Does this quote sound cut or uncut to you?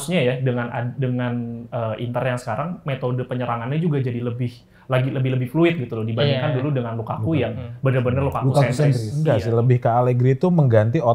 cut